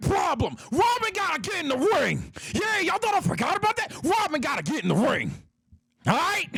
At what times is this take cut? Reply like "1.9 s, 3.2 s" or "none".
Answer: none